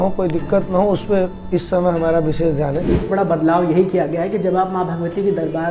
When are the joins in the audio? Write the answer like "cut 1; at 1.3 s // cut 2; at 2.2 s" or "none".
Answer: cut 1; at 3.0 s